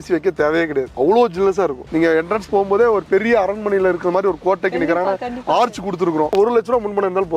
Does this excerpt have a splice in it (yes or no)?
yes